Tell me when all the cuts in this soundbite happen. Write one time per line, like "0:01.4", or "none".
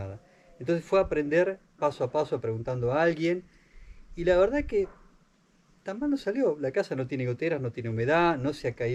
none